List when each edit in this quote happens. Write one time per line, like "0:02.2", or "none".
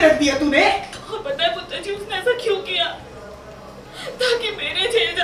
0:01.0